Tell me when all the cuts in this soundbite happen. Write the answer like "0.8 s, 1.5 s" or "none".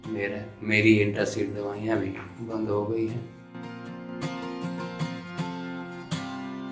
3.4 s